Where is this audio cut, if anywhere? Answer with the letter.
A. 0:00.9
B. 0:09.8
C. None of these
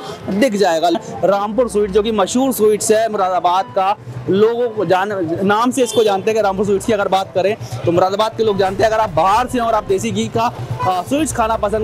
A